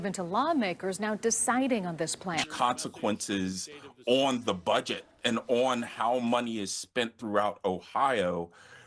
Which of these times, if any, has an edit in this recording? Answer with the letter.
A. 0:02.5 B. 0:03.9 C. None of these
A